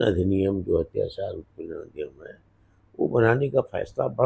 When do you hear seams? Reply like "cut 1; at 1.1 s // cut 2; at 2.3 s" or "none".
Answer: none